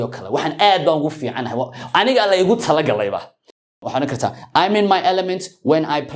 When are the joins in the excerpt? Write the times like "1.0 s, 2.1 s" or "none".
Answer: 3.5 s